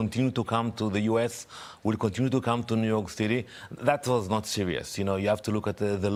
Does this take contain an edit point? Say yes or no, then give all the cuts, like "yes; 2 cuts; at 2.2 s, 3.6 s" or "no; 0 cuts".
no; 0 cuts